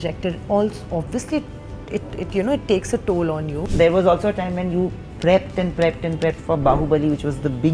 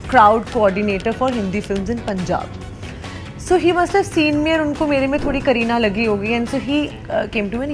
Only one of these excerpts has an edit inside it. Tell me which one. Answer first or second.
first